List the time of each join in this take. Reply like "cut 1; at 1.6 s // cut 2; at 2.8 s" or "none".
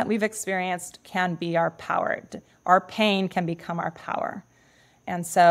none